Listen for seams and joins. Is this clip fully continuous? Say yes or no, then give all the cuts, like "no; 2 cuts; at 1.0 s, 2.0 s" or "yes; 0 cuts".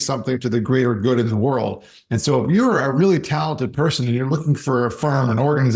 yes; 0 cuts